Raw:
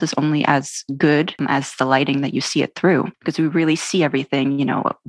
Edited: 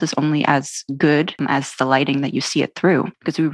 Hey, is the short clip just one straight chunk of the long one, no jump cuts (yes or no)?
yes